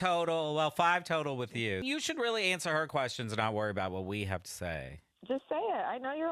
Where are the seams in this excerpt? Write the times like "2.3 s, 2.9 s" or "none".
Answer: 1.8 s